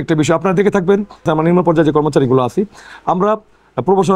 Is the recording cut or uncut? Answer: cut